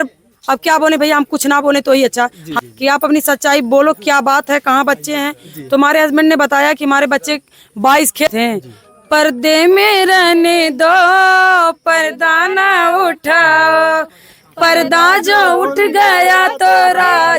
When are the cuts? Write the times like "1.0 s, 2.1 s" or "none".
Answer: 2.5 s, 8.3 s